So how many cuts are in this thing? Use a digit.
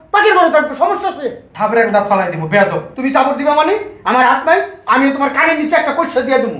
0